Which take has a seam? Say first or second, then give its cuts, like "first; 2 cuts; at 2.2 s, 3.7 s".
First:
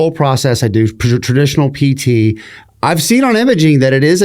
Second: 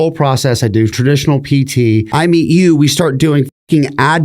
second; 2 cuts; at 1.0 s, 2.1 s